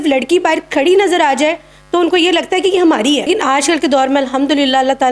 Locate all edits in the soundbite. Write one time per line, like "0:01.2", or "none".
0:03.3